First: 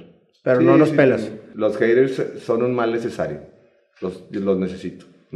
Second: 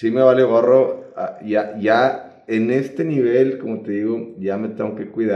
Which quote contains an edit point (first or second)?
first